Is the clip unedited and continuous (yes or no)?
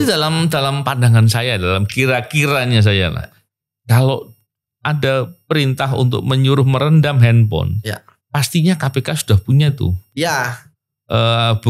yes